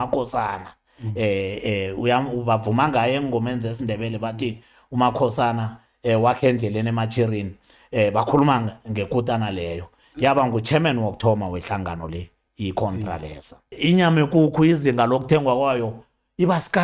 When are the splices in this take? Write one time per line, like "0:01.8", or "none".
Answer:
0:13.7